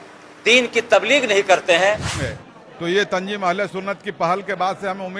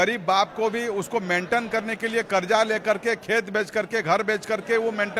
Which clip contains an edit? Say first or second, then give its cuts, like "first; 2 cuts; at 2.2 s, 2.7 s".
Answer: first; 1 cut; at 2.2 s